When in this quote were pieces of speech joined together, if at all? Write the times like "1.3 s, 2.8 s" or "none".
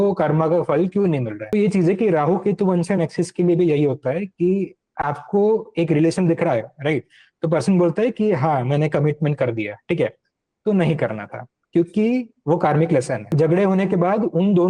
1.4 s, 13.3 s

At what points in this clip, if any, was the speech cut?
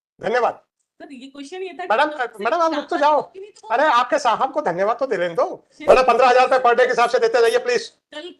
5.7 s

